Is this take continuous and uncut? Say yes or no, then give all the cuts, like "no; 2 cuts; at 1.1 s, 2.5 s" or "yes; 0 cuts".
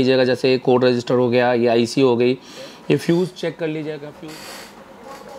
no; 1 cut; at 4.0 s